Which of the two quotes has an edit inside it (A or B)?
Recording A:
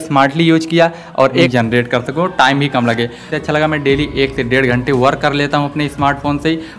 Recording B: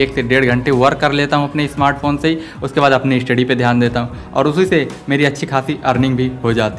A